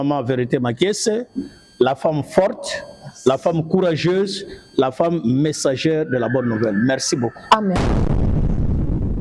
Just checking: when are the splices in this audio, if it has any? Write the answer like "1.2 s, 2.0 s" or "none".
7.8 s